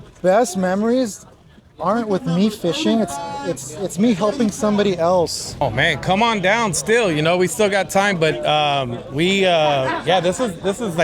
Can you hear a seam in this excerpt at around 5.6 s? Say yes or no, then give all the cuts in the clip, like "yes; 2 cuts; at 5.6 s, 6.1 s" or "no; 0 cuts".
yes; 1 cut; at 5.6 s